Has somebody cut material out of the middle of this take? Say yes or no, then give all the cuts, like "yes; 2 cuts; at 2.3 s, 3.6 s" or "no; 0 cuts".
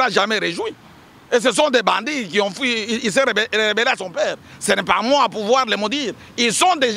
no; 0 cuts